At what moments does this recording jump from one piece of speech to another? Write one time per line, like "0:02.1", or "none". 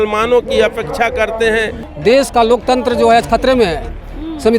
0:01.8

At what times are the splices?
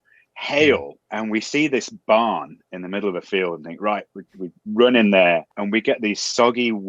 0:01.0
0:05.5

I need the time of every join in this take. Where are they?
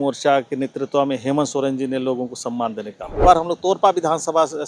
0:03.2

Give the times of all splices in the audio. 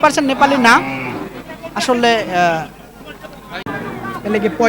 0:03.6

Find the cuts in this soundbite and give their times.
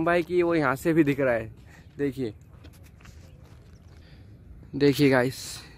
0:04.0

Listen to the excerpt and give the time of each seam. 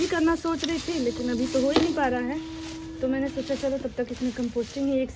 none

